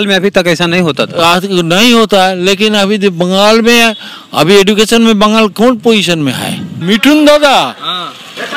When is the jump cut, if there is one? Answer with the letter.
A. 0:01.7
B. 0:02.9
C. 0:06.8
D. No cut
C